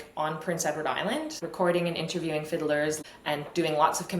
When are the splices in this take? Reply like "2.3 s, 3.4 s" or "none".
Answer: 1.4 s, 3.0 s

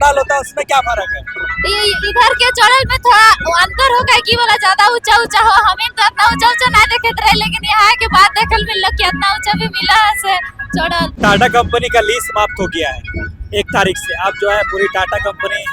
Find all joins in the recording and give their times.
11.1 s

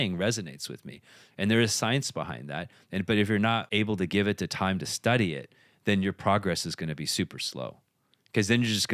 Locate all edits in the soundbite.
none

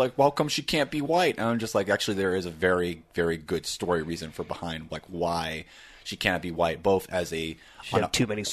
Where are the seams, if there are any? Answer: none

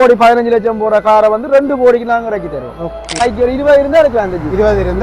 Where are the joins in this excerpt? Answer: 3.2 s

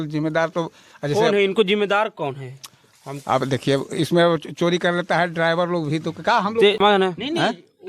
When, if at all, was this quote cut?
6.8 s

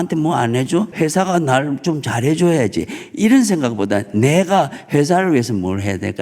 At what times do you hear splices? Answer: 0.9 s

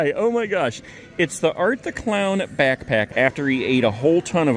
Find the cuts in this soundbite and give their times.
3.1 s

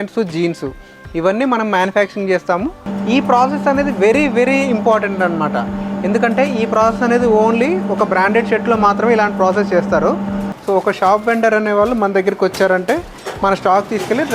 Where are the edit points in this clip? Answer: 2.9 s, 10.5 s

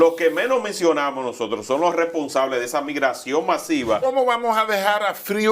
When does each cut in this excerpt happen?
4.1 s

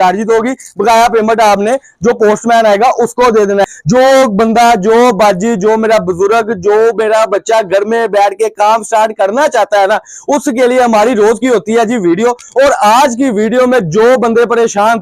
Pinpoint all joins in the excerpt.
3.8 s

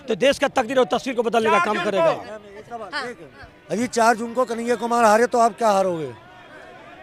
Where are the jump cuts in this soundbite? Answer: none

